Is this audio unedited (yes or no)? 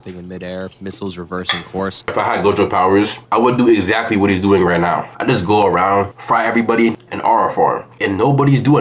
no